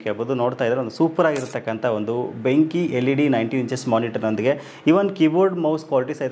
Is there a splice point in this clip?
no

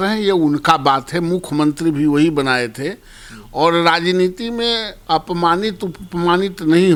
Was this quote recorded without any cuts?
yes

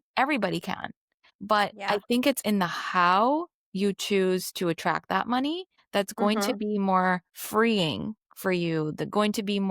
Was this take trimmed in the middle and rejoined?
yes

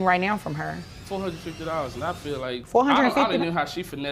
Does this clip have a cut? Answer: yes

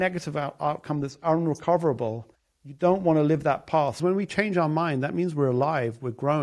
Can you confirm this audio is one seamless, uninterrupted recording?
no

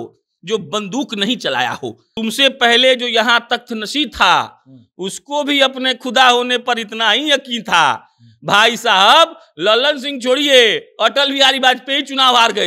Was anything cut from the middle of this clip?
yes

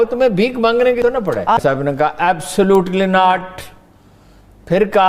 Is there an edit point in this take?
yes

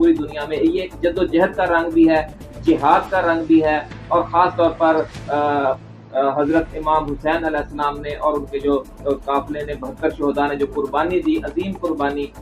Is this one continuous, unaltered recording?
yes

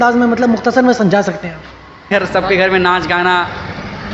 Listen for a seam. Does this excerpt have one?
yes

